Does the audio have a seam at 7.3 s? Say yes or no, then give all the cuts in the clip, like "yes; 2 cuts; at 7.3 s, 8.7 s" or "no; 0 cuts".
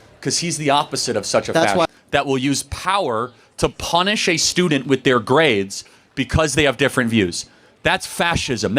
no; 1 cut; at 1.8 s